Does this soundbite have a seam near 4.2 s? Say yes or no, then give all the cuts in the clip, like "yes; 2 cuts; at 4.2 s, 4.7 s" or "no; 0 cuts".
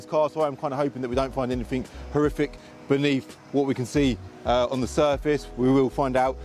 no; 0 cuts